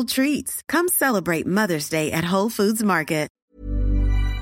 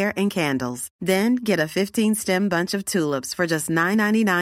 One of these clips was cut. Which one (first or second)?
first